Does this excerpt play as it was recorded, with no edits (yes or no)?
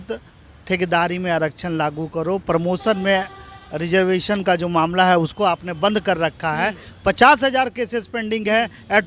yes